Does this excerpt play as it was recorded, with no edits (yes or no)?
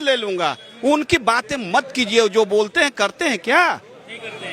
yes